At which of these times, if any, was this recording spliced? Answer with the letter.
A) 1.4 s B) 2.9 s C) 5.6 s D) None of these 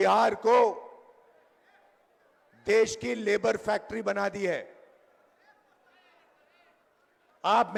D